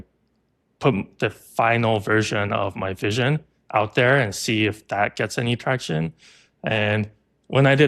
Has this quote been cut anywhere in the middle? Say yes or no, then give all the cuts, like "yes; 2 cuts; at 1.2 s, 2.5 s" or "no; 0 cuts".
no; 0 cuts